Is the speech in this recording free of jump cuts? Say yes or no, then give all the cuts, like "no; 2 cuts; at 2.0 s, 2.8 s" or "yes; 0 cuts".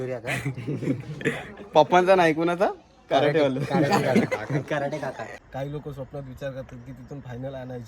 no; 1 cut; at 5.2 s